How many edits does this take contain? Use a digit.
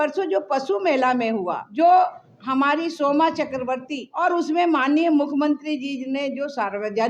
2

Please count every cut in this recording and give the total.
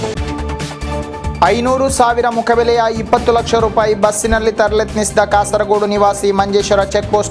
0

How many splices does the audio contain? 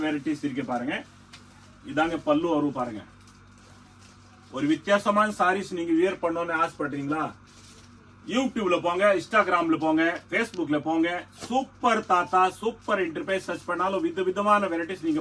0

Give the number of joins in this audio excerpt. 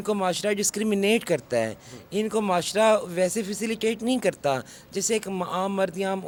0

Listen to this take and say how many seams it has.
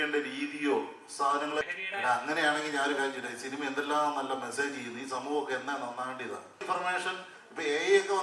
2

